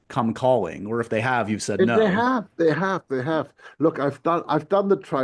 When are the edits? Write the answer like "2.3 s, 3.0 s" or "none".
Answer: 3.6 s